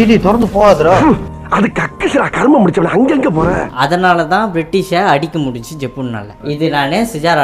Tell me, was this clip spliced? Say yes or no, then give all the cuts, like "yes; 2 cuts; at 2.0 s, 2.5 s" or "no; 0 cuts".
yes; 2 cuts; at 1.0 s, 3.7 s